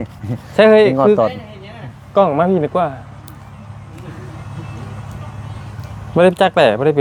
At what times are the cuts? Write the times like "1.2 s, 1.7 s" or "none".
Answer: none